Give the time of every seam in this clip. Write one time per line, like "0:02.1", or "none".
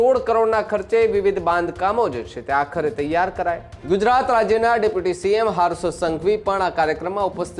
0:03.7